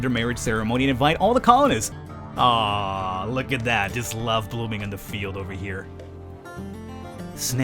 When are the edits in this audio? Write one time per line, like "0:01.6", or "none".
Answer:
0:02.0